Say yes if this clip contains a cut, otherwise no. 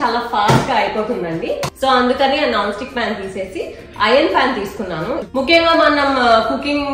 yes